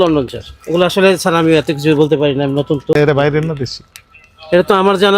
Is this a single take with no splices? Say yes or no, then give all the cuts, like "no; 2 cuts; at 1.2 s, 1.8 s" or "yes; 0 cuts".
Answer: no; 1 cut; at 2.9 s